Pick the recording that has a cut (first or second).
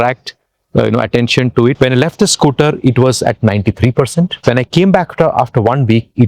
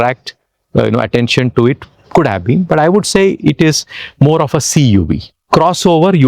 first